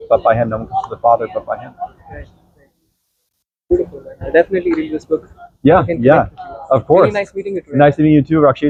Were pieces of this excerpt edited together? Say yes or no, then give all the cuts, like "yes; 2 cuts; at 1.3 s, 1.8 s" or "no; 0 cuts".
no; 0 cuts